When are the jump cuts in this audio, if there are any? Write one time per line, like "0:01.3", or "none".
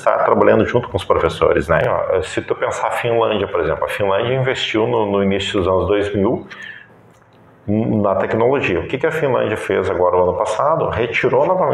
0:01.8